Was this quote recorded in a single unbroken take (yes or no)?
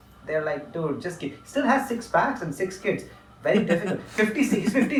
yes